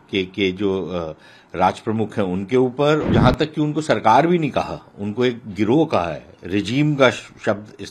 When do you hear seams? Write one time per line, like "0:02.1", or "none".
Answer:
0:03.1